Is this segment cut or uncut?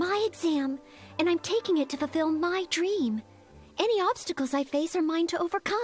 uncut